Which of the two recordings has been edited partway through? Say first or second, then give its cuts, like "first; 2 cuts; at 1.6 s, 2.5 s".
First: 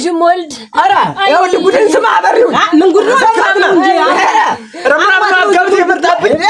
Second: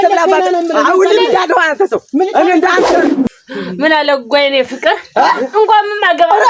second; 1 cut; at 3.1 s